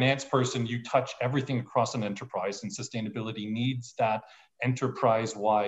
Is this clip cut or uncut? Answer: uncut